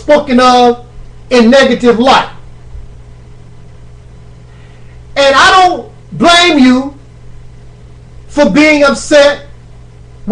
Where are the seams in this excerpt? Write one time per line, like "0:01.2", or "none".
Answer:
none